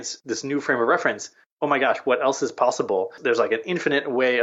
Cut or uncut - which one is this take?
cut